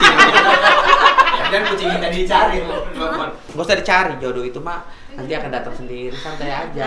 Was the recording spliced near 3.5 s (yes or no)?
yes